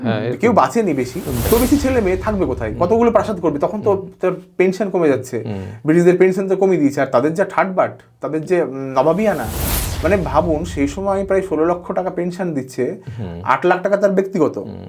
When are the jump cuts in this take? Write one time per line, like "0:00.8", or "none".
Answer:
0:01.4